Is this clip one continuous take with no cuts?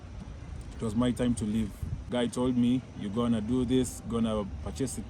no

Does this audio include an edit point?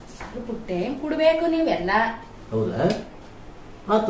no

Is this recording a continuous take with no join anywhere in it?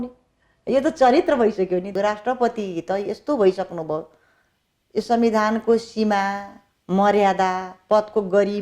no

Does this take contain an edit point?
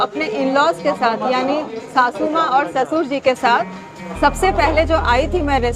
no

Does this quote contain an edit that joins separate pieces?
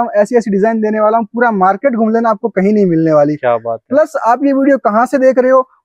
no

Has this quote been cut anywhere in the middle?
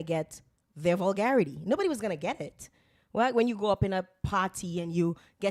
no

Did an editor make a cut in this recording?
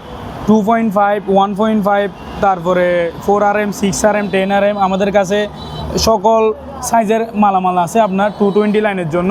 no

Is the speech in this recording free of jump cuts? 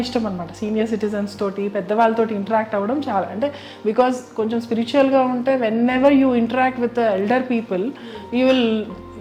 yes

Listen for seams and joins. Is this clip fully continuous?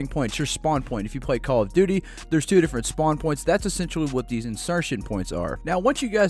yes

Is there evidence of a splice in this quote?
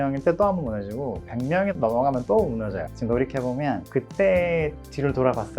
yes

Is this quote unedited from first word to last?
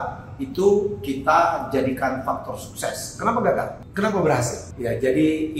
no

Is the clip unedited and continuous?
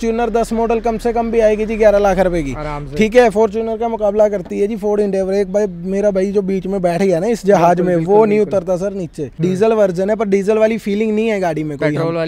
no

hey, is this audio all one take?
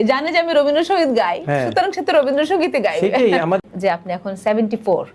no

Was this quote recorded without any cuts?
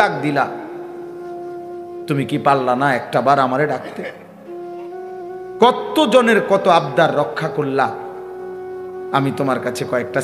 no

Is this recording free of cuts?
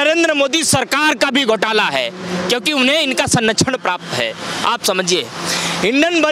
yes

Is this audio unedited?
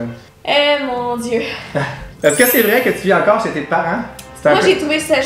no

